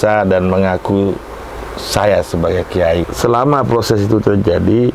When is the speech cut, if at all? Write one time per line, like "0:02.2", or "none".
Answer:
0:03.1